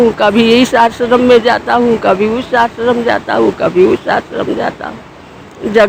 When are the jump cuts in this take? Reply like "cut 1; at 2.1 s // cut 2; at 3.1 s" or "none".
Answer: none